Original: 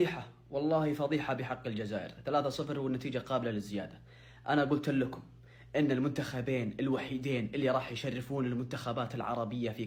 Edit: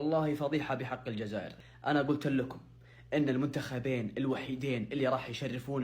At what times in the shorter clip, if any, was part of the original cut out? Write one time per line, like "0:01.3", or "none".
0:01.5